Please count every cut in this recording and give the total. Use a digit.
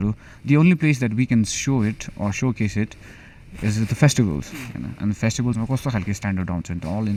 0